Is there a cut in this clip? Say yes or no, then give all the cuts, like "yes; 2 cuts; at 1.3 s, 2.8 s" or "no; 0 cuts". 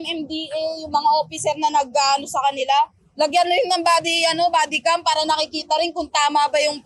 no; 0 cuts